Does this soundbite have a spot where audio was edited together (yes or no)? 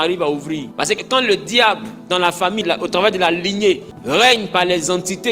yes